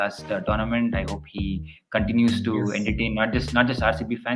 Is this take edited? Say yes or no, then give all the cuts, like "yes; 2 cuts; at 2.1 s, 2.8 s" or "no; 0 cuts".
no; 0 cuts